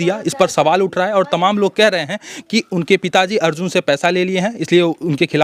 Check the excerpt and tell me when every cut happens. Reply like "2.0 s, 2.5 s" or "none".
none